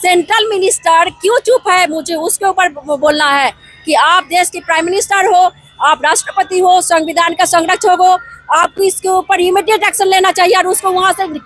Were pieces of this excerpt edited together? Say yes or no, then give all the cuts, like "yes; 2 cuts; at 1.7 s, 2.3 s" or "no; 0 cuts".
no; 0 cuts